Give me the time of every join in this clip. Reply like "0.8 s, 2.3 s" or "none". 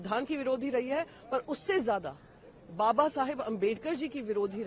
none